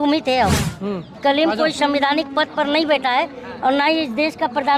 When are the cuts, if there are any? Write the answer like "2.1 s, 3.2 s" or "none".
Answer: 1.2 s